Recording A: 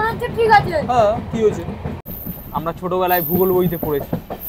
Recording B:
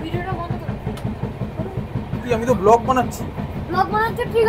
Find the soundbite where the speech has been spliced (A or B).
A